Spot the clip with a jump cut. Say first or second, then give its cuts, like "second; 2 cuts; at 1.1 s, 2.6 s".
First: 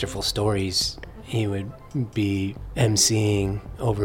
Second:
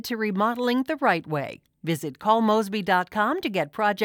first; 2 cuts; at 1.5 s, 2.6 s